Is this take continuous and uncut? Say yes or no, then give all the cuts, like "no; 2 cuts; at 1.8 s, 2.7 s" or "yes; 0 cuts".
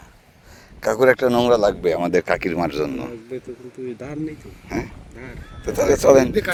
yes; 0 cuts